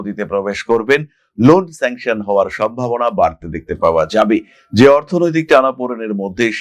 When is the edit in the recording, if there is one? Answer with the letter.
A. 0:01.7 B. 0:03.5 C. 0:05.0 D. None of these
D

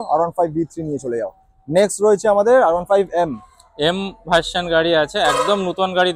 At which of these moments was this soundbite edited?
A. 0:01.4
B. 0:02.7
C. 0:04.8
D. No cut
D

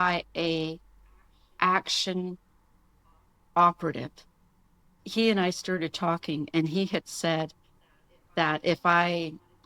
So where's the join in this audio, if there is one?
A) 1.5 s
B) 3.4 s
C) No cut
B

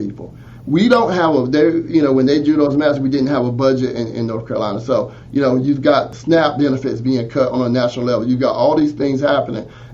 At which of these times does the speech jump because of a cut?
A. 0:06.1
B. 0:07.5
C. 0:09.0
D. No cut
A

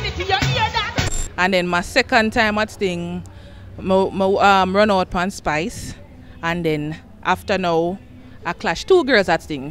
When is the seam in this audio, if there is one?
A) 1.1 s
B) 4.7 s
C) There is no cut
A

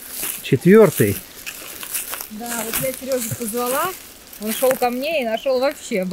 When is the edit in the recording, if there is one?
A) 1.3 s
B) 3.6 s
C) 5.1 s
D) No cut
D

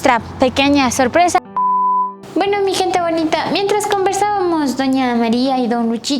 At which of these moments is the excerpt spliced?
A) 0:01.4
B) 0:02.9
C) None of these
A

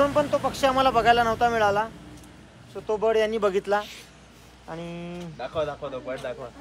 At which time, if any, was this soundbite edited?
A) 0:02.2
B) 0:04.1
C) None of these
C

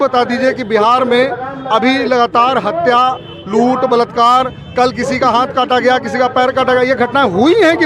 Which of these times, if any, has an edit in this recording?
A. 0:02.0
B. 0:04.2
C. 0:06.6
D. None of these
D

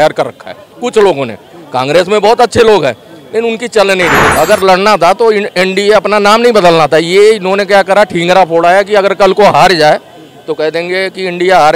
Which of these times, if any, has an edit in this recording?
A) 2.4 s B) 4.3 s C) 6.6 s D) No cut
B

